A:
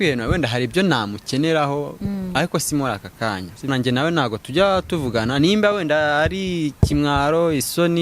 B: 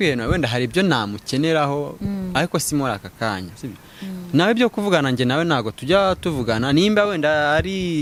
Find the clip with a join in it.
A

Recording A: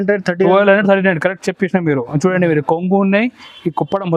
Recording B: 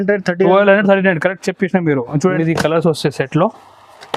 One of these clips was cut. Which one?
B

